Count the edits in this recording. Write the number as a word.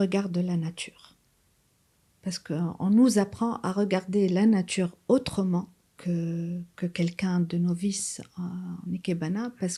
zero